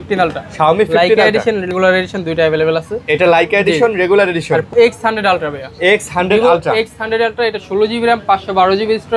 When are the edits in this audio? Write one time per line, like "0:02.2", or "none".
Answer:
0:01.7
0:04.7